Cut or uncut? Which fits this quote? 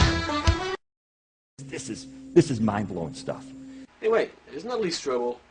uncut